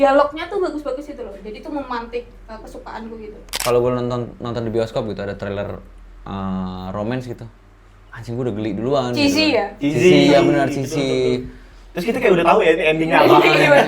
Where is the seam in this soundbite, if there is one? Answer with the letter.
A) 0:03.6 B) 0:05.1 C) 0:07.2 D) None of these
A